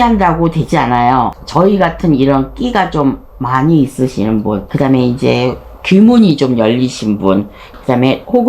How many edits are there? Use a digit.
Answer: 1